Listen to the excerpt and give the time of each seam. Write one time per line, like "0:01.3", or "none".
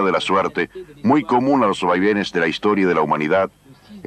0:01.8

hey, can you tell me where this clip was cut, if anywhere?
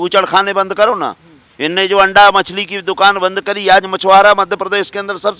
none

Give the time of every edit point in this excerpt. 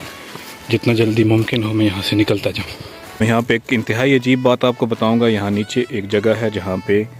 0:03.2

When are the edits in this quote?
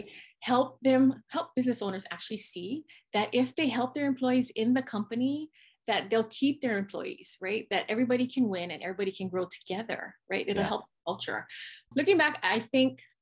0:11.9

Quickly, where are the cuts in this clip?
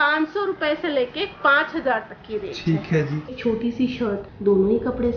0:03.3

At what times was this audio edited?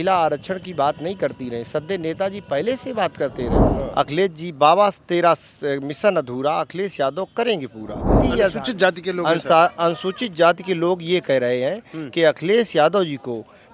0:03.6
0:08.2

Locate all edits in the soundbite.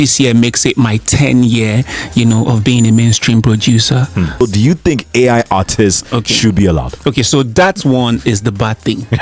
0:04.4

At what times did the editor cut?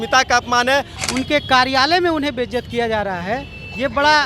0:01.0

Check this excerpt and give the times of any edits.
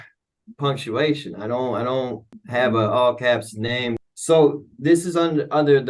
0:02.3
0:04.0

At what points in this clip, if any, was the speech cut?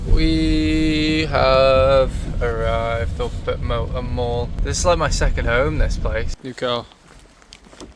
none

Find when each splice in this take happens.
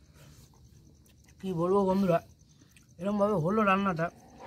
0:01.1

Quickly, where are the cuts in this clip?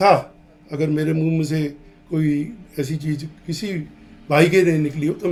none

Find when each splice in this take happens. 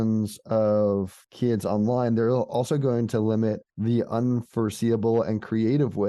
0:01.2
0:03.7

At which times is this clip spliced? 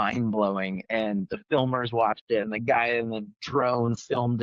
none

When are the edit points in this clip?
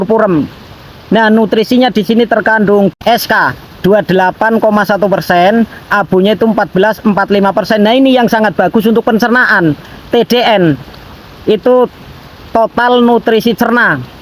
0:02.9

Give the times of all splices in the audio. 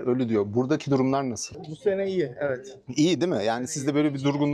0:01.5

